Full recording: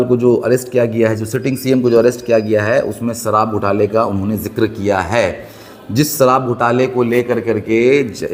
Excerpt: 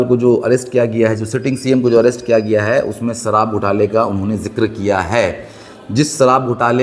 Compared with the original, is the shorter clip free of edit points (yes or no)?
yes